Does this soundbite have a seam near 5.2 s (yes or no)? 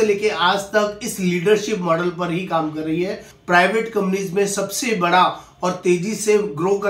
no